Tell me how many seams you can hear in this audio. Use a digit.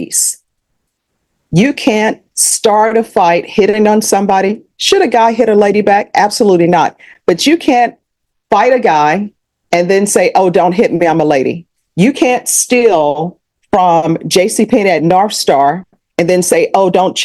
0